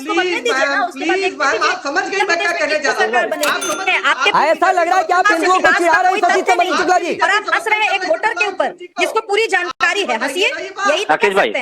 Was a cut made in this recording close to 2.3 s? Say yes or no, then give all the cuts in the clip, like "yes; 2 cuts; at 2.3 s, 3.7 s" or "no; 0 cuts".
no; 1 cut; at 3.7 s